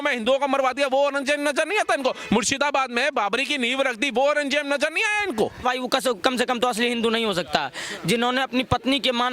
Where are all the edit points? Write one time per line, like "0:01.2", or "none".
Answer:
0:05.6